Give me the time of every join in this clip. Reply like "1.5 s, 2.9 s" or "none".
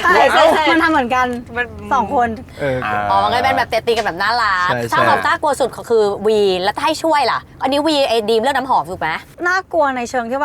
none